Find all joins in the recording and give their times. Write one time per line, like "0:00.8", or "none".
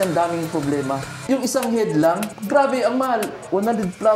0:01.1
0:02.4